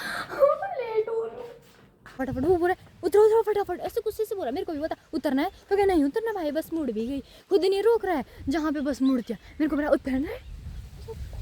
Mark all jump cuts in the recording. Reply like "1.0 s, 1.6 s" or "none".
2.2 s